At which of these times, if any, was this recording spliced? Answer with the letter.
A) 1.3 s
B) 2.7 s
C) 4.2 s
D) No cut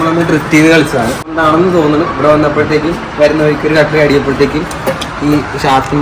A